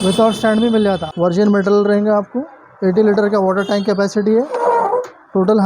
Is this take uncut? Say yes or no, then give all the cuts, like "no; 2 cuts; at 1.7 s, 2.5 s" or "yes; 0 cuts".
no; 1 cut; at 1.3 s